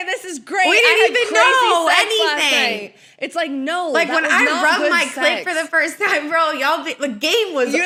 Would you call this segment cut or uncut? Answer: uncut